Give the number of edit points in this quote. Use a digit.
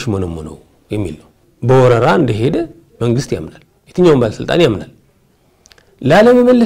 1